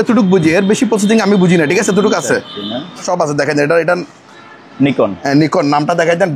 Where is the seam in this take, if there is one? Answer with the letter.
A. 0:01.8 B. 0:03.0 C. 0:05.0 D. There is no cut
B